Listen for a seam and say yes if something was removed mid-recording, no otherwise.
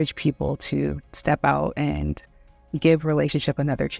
no